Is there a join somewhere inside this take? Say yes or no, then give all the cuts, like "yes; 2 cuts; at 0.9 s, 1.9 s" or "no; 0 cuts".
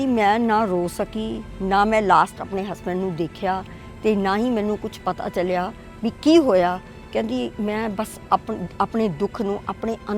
no; 0 cuts